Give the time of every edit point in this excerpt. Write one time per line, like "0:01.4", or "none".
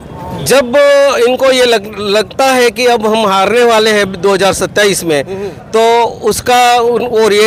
none